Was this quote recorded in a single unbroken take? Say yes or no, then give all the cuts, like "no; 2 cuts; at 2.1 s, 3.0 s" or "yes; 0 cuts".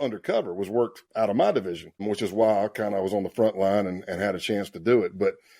no; 1 cut; at 1.0 s